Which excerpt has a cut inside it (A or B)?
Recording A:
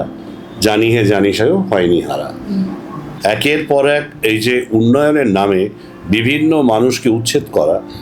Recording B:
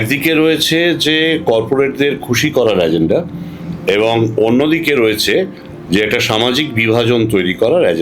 A